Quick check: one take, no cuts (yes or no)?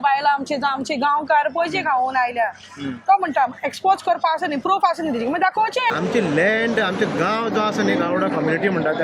no